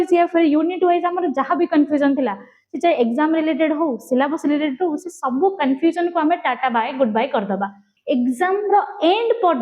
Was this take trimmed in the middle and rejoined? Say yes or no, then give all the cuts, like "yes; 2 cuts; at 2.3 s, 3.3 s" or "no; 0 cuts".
yes; 1 cut; at 7.9 s